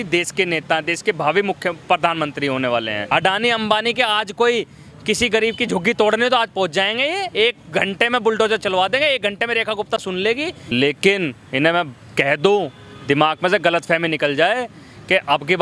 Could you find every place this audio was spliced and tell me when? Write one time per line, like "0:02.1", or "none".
0:03.0
0:10.6